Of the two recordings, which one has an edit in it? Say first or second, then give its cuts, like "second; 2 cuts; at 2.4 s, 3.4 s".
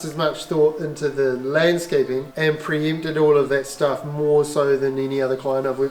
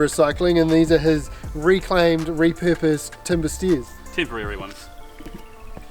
first; 1 cut; at 2.3 s